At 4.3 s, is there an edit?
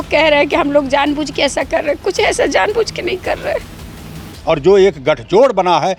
yes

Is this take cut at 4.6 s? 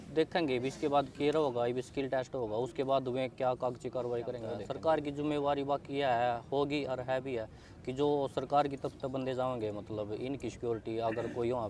yes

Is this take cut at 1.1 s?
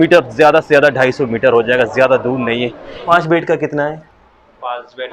no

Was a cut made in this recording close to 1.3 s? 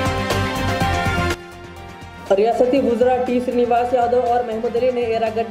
no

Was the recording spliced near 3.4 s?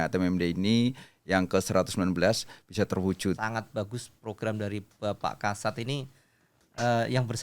yes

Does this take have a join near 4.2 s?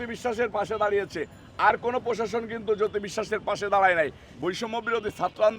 yes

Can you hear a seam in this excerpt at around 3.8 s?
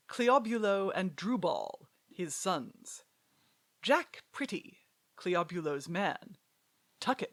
no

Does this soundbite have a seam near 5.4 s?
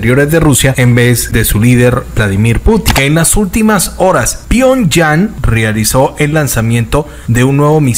yes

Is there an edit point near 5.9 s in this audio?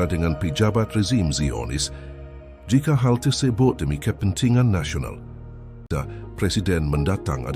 yes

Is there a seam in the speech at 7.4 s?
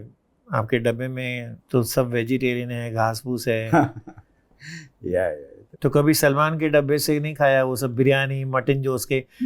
no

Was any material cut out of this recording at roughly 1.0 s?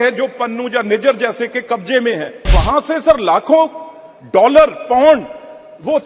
no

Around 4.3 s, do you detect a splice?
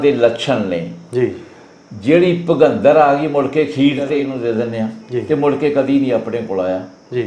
yes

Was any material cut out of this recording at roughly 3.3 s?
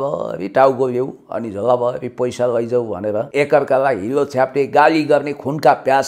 yes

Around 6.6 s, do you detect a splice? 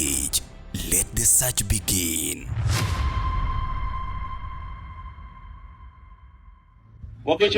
yes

